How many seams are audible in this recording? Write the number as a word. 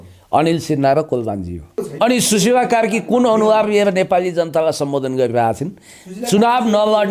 one